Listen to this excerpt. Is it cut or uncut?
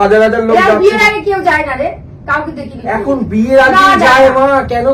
uncut